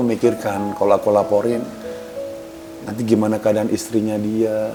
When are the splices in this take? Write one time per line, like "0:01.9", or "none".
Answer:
none